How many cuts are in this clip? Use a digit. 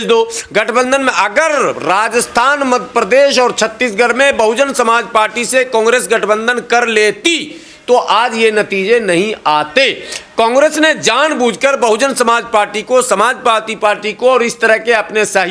0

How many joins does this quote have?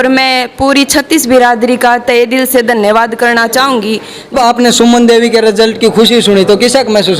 1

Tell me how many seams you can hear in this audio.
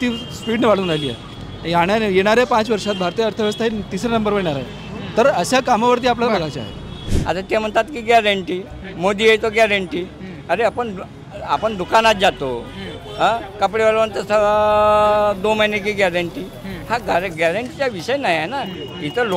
1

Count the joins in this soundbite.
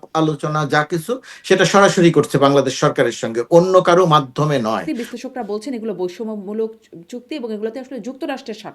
1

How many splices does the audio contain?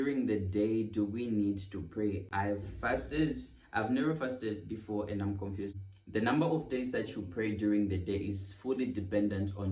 0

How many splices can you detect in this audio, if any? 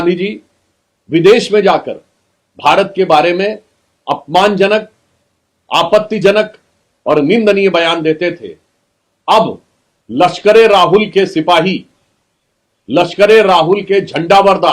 0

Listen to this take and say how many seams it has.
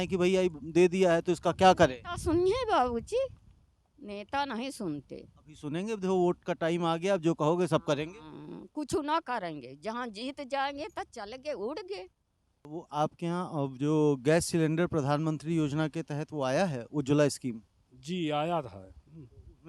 1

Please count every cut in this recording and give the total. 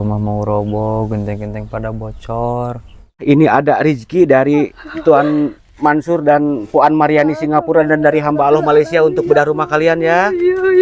1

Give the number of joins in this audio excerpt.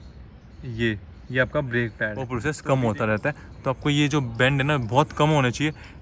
1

